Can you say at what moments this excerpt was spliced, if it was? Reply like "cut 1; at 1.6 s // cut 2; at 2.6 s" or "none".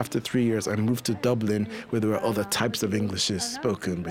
none